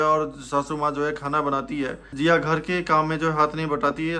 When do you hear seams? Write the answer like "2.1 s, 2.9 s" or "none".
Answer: 2.0 s

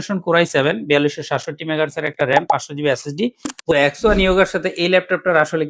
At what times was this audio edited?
3.6 s

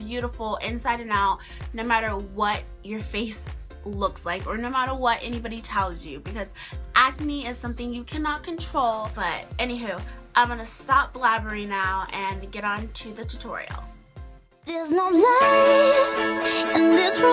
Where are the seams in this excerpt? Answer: none

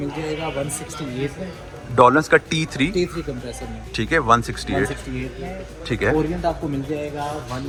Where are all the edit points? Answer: none

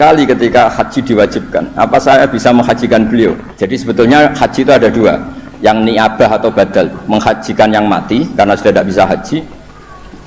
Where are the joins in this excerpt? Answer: 3.5 s

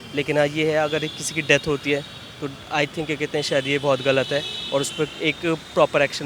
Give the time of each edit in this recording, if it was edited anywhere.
none

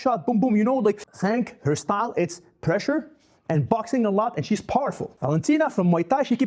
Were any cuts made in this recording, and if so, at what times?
1.1 s, 5.1 s

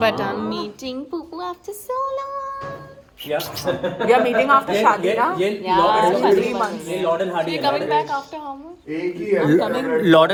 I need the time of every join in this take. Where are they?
none

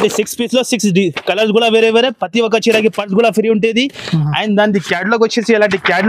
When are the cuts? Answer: none

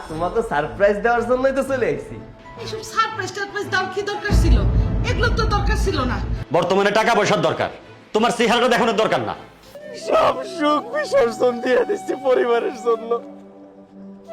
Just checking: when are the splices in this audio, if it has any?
6.3 s, 9.7 s

